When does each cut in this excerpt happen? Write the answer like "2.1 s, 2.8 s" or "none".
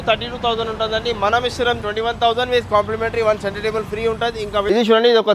1.8 s, 4.7 s

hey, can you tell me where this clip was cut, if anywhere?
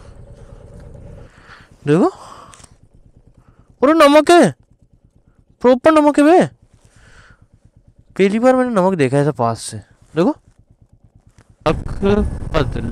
1.4 s, 11.7 s

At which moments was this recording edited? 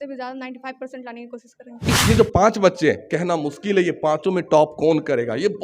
2.0 s

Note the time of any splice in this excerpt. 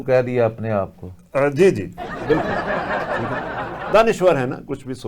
2.4 s, 3.9 s

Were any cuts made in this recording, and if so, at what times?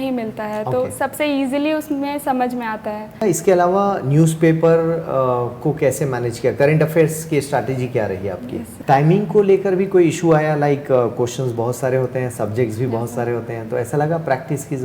3.2 s, 8.7 s

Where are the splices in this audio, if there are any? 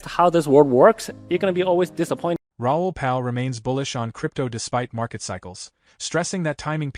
2.5 s

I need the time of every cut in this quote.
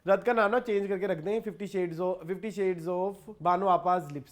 3.3 s

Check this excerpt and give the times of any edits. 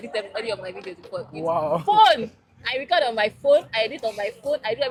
none

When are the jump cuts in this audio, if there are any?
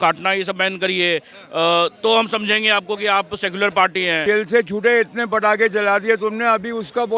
4.2 s

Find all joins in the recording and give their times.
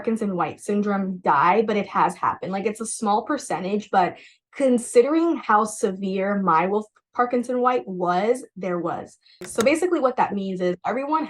9.5 s

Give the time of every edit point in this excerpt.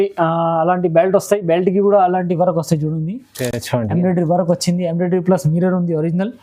none

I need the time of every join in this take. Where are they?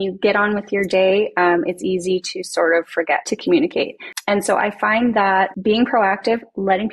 3.2 s, 4.1 s, 5.6 s

